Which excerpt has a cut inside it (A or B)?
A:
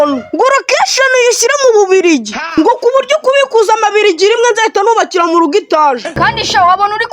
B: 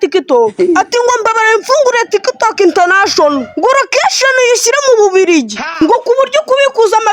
A